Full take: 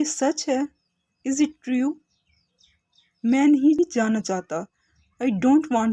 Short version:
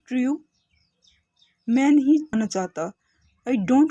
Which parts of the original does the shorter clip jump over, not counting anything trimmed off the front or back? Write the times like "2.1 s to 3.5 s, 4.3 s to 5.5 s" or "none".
3.8 s to 4.0 s